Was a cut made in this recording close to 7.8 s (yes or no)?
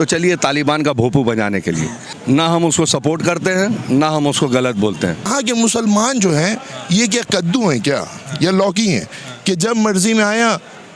no